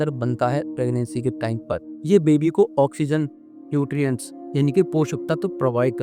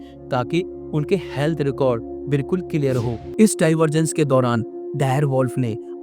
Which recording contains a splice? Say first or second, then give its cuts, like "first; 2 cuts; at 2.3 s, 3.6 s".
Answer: second; 1 cut; at 3.2 s